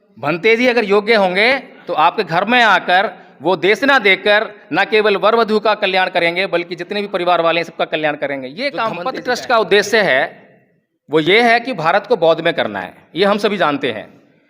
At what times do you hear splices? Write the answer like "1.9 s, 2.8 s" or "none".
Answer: 9.1 s

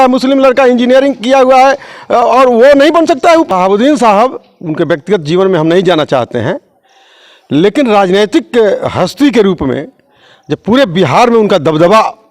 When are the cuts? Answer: 3.5 s

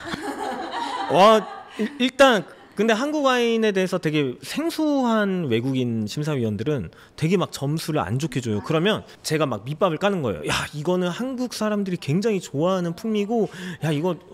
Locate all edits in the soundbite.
none

